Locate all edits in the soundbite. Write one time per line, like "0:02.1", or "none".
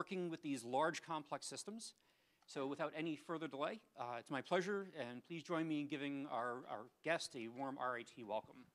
0:02.2